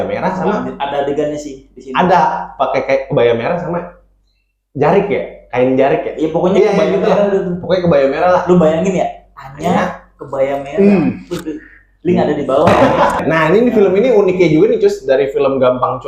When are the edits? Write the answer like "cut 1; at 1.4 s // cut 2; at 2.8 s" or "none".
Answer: cut 1; at 13.2 s